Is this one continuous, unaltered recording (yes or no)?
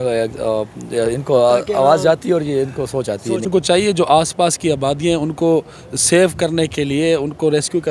no